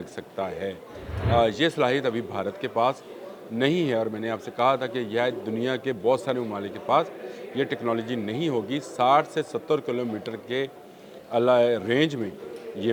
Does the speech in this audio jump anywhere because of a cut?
no; 0 cuts

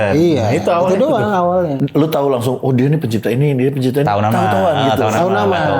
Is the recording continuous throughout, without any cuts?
no; 1 cut; at 1.8 s

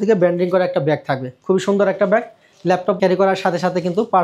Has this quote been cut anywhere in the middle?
yes; 1 cut; at 3.0 s

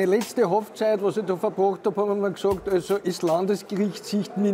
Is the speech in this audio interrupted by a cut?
no; 0 cuts

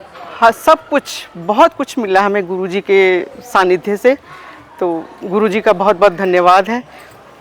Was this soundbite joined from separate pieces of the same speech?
no; 0 cuts

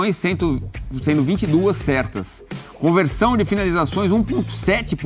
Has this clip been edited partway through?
no; 0 cuts

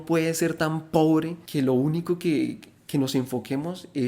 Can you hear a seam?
yes; 1 cut; at 1.4 s

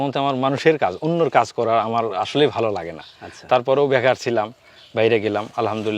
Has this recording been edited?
no; 0 cuts

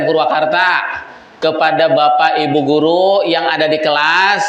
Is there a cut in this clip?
no; 0 cuts

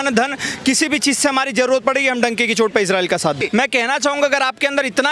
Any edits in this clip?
yes; 1 cut; at 3.4 s

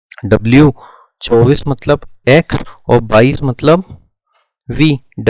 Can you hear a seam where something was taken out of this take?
no; 0 cuts

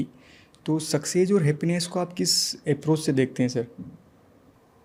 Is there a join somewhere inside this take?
no; 0 cuts

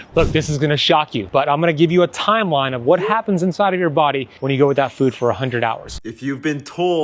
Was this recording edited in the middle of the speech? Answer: yes; 1 cut; at 5.9 s

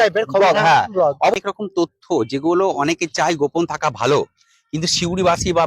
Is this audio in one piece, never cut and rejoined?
no; 1 cut; at 1.3 s

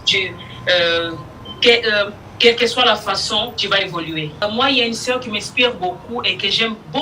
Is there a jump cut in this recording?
yes; 1 cut; at 4.4 s

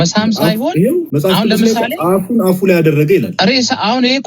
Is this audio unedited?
no; 2 cuts; at 1.1 s, 3.3 s

